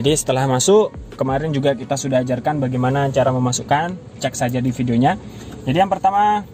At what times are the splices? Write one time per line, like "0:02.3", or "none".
none